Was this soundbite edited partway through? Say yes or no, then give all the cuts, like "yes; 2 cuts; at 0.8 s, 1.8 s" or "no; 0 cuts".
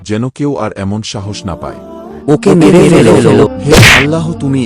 yes; 2 cuts; at 2.1 s, 3.5 s